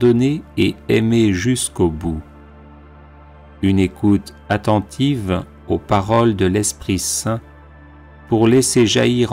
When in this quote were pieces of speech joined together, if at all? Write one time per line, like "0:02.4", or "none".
0:02.2
0:03.6

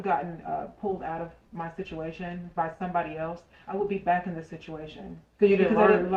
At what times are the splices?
none

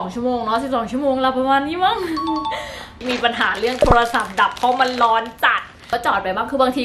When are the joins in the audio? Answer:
0:03.0
0:05.8

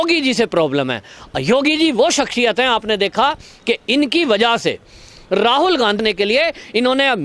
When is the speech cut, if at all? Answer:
0:06.0

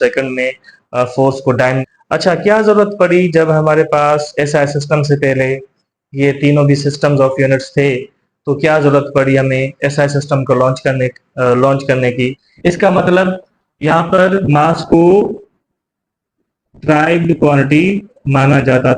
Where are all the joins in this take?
0:01.8
0:12.4

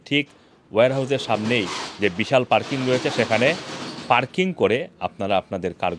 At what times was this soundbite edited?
none

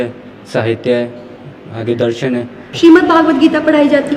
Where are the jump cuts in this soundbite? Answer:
0:02.6

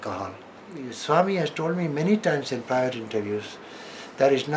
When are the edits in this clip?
0:00.9

